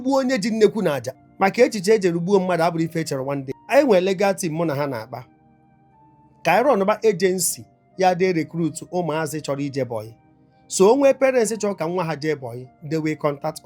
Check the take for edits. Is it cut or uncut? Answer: cut